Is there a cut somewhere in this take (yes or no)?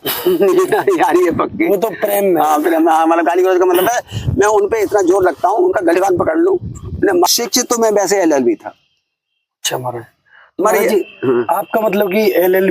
yes